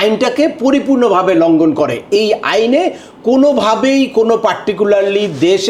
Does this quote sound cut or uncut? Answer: uncut